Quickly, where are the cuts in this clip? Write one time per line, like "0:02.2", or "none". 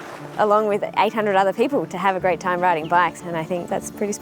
0:01.9
0:03.3